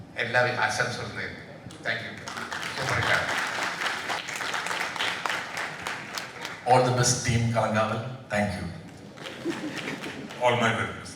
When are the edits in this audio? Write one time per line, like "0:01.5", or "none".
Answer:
0:04.2